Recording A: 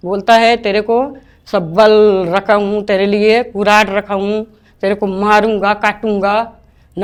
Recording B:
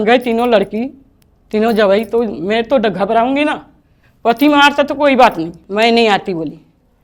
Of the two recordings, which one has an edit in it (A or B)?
B